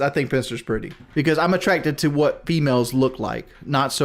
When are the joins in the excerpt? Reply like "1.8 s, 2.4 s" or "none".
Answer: 1.0 s